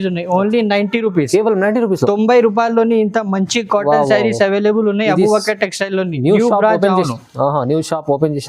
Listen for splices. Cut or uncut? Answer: uncut